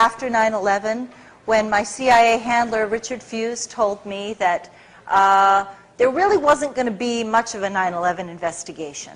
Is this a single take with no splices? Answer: yes; 0 cuts

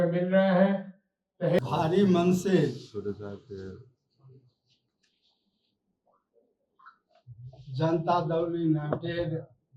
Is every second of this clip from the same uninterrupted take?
no; 1 cut; at 1.6 s

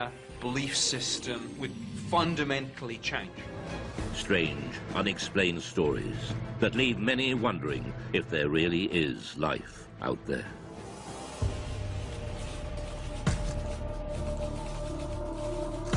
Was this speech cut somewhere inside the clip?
yes; 1 cut; at 6.4 s

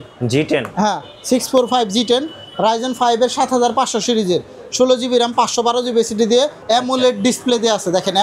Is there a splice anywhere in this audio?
yes; 1 cut; at 6.6 s

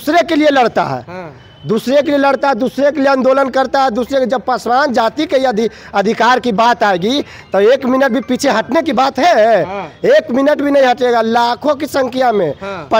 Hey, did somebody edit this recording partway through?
no; 0 cuts

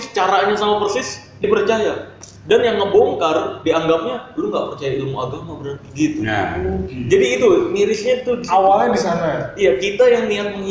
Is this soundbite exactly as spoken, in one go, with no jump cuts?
yes; 0 cuts

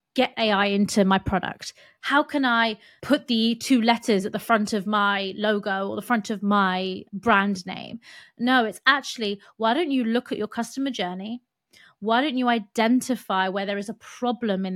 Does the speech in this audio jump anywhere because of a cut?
yes; 2 cuts; at 2.9 s, 7.0 s

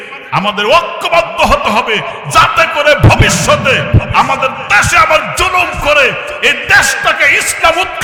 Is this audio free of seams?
yes; 0 cuts

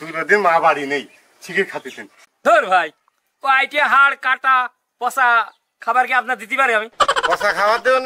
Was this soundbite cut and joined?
no; 0 cuts

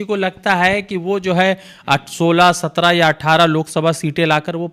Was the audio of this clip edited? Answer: no; 0 cuts

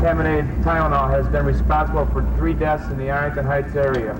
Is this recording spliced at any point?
no; 0 cuts

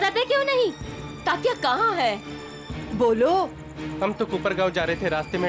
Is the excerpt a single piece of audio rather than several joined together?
yes; 0 cuts

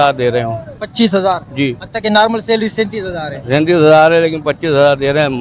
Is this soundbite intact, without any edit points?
yes; 0 cuts

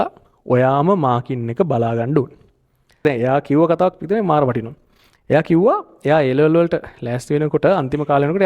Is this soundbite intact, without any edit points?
no; 1 cut; at 3.0 s

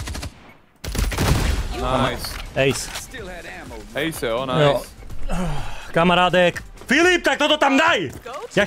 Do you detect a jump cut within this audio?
no; 0 cuts

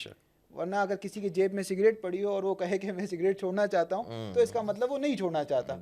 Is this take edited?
no; 0 cuts

